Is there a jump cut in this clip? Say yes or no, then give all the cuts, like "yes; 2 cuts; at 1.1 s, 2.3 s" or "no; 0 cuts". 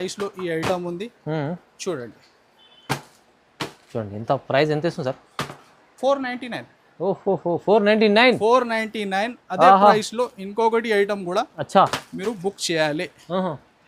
no; 0 cuts